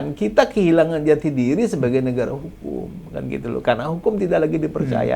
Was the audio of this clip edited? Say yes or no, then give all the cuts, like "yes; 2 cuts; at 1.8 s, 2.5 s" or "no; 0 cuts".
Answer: no; 0 cuts